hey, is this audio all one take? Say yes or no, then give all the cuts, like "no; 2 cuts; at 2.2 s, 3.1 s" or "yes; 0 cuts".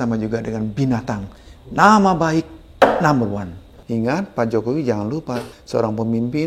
no; 2 cuts; at 3.7 s, 5.5 s